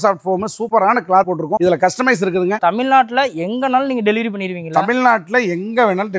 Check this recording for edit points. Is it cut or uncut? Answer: cut